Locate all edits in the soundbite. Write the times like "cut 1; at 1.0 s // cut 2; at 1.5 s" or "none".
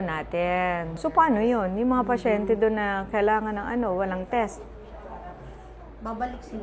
none